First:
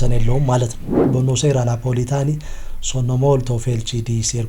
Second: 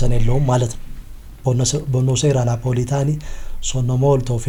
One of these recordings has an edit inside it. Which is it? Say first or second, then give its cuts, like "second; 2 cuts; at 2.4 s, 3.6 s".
first; 1 cut; at 1.1 s